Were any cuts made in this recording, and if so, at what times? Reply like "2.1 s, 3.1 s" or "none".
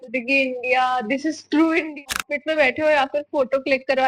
2.0 s